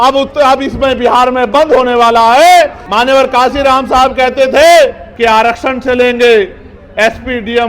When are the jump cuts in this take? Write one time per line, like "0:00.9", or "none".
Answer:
0:02.8
0:05.0

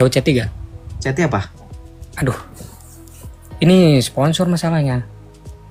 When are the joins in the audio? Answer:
none

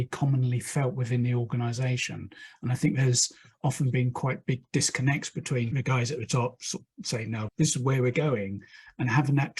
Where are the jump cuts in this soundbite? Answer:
0:07.5

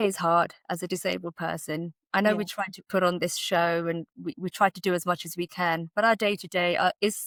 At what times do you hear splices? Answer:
none

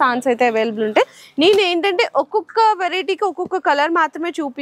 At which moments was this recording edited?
none

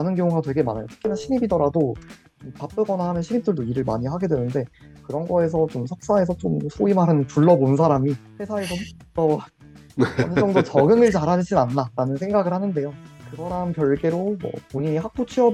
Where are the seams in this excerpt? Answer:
none

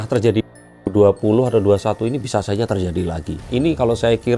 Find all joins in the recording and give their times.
0:03.4

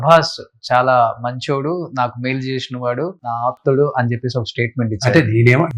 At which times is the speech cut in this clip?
0:03.3

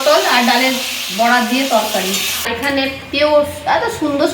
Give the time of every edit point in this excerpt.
0:02.5

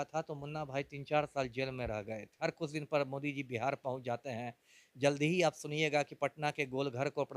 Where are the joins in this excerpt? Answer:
0:02.4

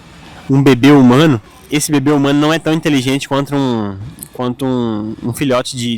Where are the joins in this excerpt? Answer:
0:01.5

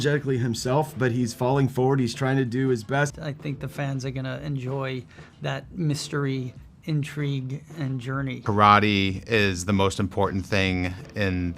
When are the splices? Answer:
0:03.1
0:08.4

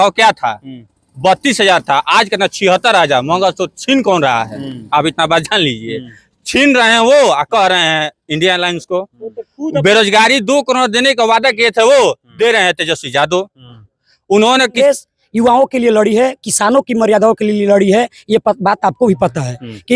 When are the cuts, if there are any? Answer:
0:14.7

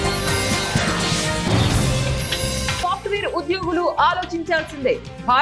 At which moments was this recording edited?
0:02.8

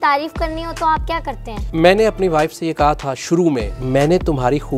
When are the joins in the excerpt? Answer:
0:01.5
0:03.8

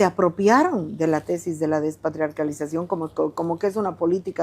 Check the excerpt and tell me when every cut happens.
none

